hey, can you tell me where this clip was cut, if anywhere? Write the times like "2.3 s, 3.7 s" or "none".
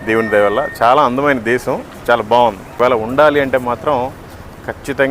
2.7 s